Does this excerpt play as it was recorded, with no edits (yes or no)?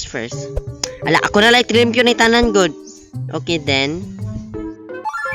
yes